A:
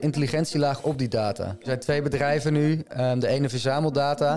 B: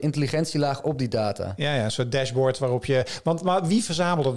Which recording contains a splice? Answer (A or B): A